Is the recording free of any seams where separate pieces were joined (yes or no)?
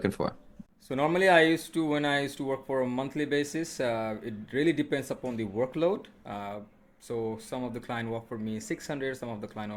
yes